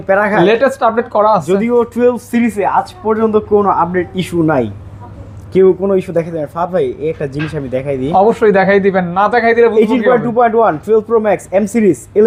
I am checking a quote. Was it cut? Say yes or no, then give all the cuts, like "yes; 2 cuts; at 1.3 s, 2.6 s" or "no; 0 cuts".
no; 0 cuts